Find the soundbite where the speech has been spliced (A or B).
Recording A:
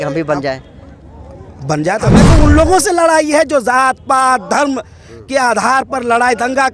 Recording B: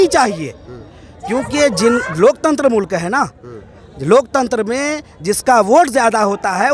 A